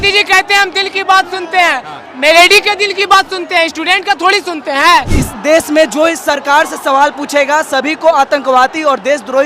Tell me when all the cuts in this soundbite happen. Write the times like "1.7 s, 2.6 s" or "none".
5.1 s